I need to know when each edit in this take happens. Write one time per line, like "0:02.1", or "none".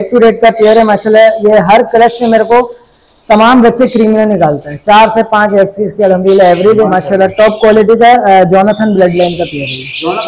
0:06.9